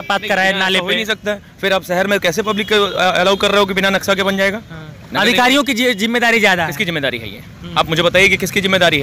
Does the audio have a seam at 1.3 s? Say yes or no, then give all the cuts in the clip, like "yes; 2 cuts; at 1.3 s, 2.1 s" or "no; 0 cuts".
no; 0 cuts